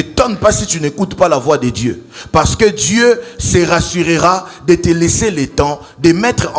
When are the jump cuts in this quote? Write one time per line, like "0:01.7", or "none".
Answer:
none